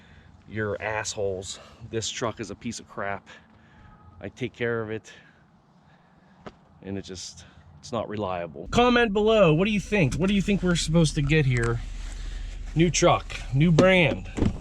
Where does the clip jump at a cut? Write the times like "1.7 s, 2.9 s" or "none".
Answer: 8.6 s